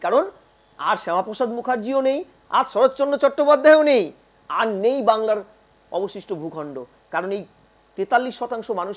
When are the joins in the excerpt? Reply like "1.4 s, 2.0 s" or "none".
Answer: none